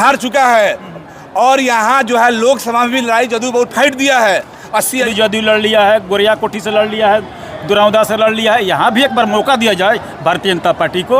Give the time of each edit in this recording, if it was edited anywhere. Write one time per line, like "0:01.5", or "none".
0:05.1